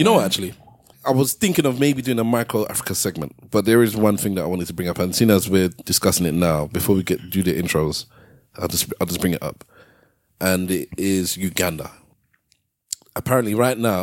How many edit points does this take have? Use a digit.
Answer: 2